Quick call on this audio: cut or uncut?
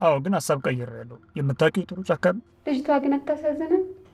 cut